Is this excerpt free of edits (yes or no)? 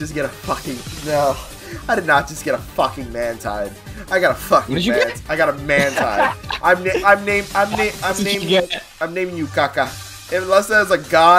no